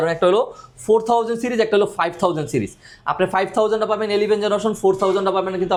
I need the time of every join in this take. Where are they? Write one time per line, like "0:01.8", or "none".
none